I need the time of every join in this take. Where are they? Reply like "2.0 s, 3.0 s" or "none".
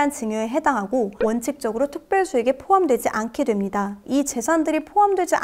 1.1 s, 4.0 s